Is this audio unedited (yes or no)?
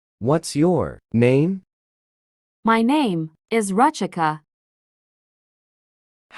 no